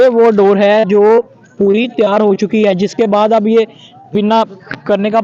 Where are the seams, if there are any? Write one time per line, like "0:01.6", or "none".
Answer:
none